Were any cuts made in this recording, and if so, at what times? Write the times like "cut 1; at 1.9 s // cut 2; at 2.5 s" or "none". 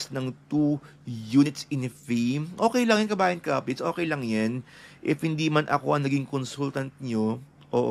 none